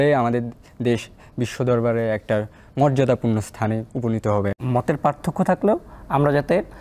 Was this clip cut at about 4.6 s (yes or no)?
yes